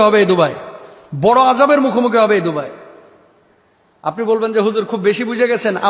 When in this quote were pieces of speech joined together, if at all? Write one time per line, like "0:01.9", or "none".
none